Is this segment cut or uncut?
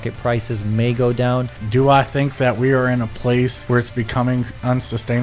cut